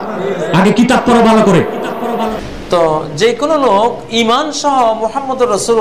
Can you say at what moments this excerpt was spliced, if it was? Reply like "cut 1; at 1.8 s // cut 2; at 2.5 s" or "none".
cut 1; at 2.4 s

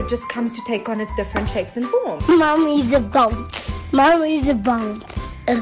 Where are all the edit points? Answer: cut 1; at 2.2 s

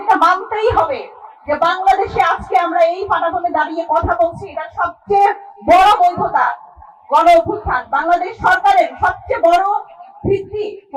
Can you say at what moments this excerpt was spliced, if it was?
none

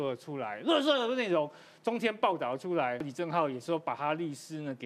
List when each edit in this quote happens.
cut 1; at 3.1 s

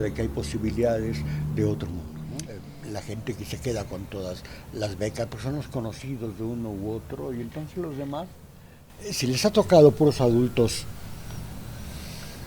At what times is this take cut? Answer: cut 1; at 2.4 s // cut 2; at 8.8 s

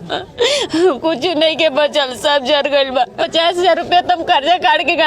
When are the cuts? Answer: cut 1; at 3.1 s

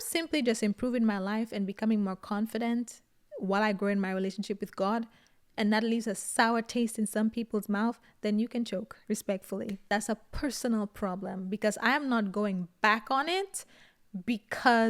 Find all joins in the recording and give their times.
cut 1; at 9.8 s

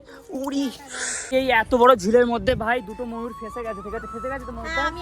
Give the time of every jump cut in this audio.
cut 1; at 1.3 s

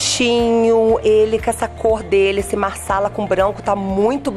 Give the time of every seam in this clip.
cut 1; at 1.0 s

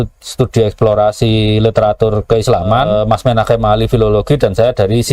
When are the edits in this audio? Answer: cut 1; at 2.9 s

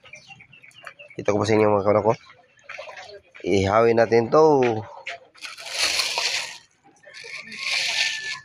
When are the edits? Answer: none

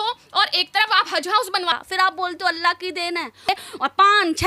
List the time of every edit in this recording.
cut 1; at 1.8 s // cut 2; at 3.5 s

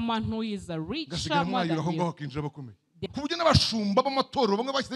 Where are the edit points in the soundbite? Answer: cut 1; at 3.1 s

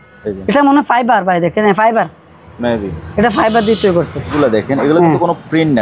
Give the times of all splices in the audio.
cut 1; at 4.3 s

